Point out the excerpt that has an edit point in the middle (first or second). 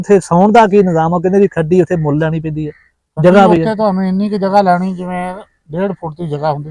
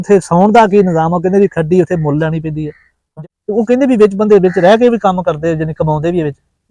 second